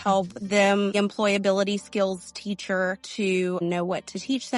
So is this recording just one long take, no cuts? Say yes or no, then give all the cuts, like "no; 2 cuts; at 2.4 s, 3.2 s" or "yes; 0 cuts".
no; 2 cuts; at 0.9 s, 3.6 s